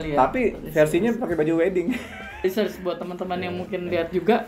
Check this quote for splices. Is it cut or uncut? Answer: cut